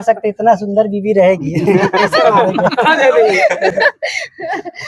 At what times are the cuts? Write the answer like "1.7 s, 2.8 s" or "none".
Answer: none

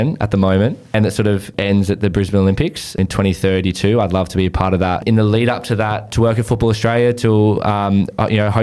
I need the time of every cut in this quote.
1.3 s, 3.0 s, 5.0 s, 6.1 s

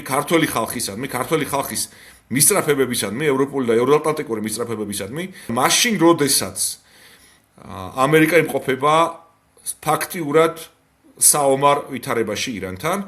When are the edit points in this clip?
5.5 s

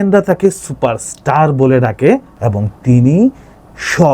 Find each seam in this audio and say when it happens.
2.3 s

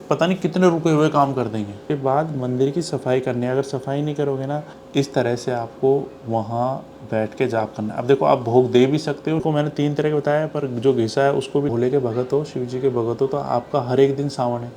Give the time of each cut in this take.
1.8 s, 4.7 s, 9.4 s, 11.7 s

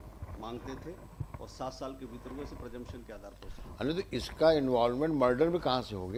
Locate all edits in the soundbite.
none

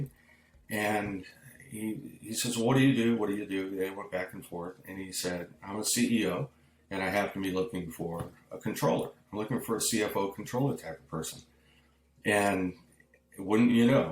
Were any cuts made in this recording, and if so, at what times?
none

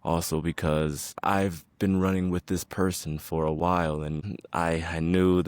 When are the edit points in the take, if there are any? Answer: 4.3 s

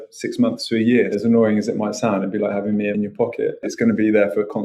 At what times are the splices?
1.2 s, 3.2 s

